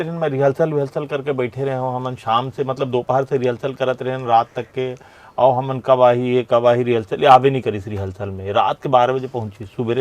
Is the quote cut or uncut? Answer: uncut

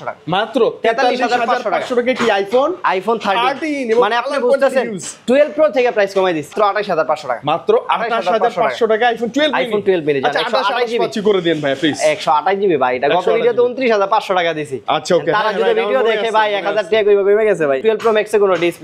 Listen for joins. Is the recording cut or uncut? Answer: cut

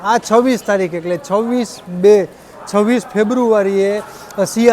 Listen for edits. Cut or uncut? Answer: uncut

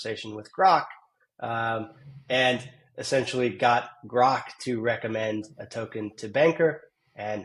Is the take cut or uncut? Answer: uncut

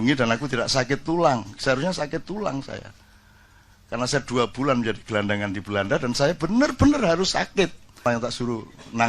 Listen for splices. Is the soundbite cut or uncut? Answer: cut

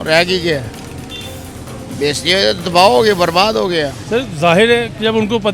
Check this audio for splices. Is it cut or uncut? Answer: cut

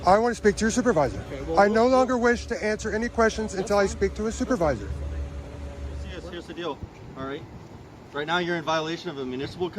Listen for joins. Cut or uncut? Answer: cut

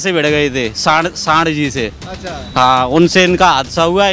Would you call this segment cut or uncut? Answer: uncut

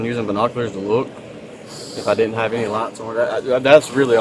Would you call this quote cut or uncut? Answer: uncut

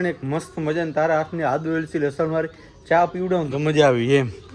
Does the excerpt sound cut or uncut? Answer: uncut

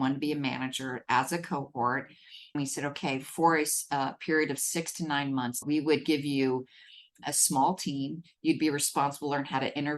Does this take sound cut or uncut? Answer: cut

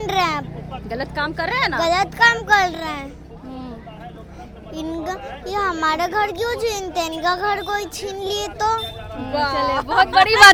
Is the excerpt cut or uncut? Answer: uncut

